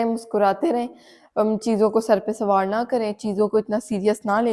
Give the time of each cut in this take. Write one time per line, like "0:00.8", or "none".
none